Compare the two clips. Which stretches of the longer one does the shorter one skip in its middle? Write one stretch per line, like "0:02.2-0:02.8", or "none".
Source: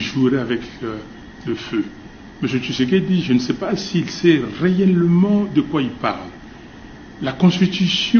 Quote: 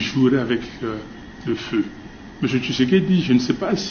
none